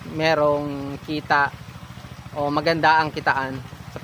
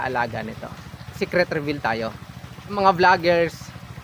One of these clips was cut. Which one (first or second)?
second